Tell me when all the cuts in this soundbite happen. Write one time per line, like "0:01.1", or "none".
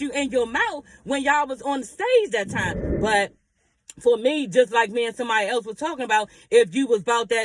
0:03.0